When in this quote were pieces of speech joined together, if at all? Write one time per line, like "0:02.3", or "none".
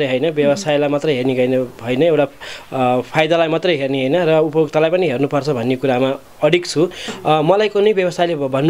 0:07.1